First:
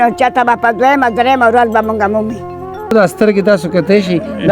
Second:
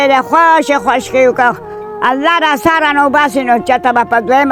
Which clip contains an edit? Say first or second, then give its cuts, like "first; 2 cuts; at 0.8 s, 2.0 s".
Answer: first; 1 cut; at 2.9 s